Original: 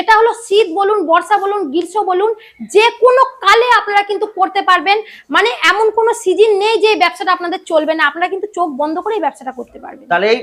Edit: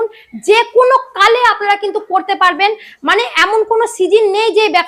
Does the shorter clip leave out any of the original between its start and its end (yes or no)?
no